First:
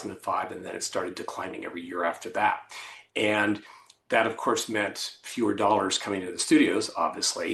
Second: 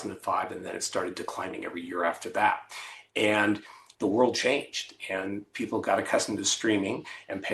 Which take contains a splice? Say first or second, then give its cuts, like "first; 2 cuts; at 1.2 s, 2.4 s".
second; 1 cut; at 3.8 s